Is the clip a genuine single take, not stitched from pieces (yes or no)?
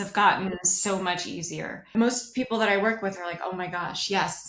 no